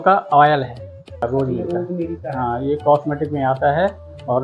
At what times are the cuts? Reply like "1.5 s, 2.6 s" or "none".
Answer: 1.2 s